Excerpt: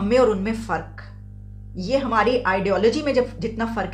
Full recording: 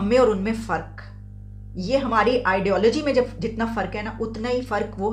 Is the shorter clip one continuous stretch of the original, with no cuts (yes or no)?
yes